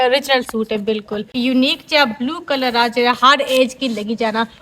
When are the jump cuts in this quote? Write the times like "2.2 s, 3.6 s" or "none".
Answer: 1.3 s